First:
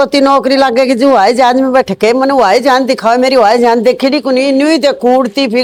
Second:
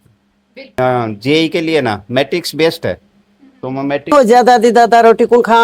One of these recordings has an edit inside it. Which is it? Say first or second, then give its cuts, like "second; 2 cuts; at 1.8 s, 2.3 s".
second; 2 cuts; at 0.8 s, 4.1 s